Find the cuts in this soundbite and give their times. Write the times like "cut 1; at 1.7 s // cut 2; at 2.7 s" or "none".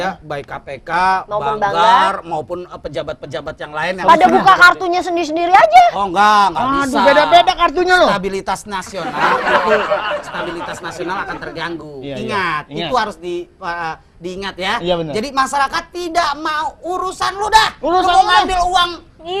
none

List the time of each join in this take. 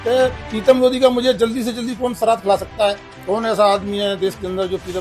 none

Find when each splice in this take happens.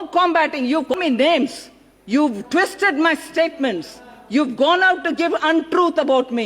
cut 1; at 0.9 s

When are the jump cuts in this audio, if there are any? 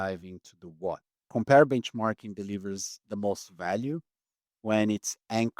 cut 1; at 1.2 s

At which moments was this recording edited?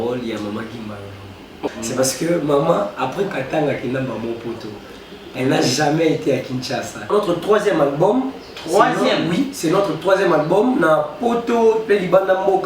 cut 1; at 1.7 s // cut 2; at 7.1 s

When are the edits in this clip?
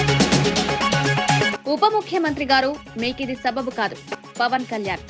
none

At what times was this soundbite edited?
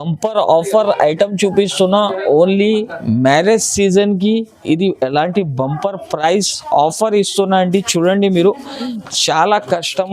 cut 1; at 8.9 s

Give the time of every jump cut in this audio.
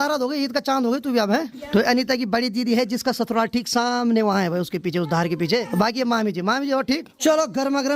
cut 1; at 1.6 s // cut 2; at 5.7 s // cut 3; at 7.1 s

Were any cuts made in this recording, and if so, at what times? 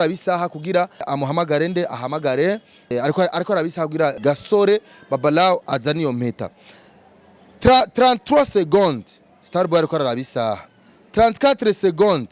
cut 1; at 1.1 s // cut 2; at 2.9 s // cut 3; at 4.2 s

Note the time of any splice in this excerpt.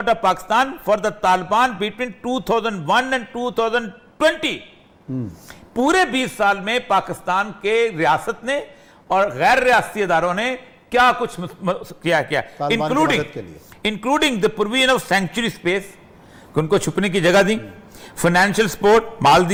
none

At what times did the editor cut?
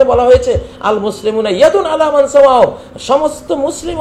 none

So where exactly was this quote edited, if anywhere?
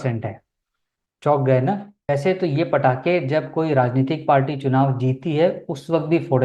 cut 1; at 2.1 s

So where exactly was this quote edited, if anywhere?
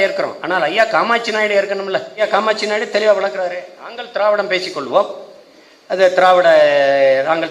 cut 1; at 2.2 s

